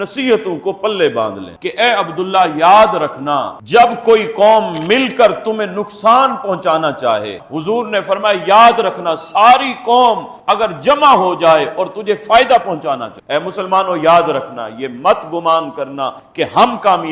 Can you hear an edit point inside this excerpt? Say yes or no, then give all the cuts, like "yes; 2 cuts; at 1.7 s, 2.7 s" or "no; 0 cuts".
yes; 3 cuts; at 1.5 s, 7.4 s, 13.1 s